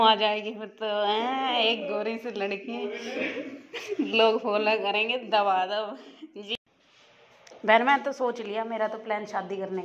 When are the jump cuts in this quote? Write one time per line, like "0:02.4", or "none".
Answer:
0:06.6